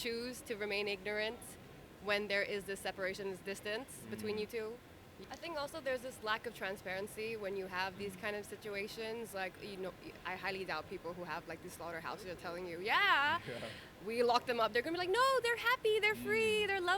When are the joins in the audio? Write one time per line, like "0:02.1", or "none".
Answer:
0:05.1